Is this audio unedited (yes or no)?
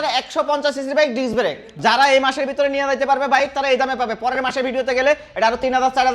no